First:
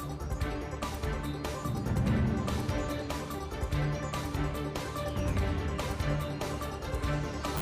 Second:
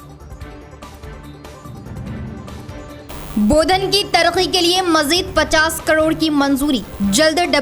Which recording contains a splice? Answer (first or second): second